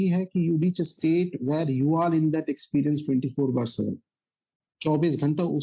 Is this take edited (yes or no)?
no